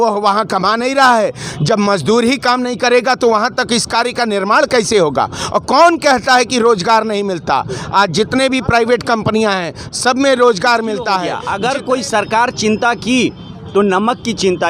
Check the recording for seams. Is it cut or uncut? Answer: cut